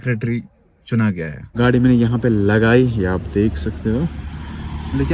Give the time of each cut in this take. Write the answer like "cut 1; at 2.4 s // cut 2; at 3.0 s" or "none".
cut 1; at 1.4 s